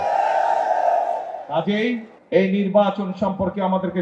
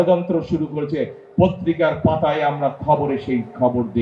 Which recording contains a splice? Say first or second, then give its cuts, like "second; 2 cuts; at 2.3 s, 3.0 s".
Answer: first; 1 cut; at 2.1 s